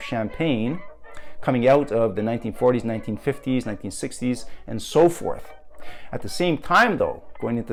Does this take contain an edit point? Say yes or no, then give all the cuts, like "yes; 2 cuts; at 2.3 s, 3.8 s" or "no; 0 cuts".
no; 0 cuts